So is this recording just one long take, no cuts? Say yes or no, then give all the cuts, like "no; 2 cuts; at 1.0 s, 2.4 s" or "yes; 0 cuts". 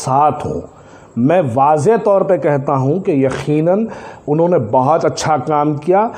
yes; 0 cuts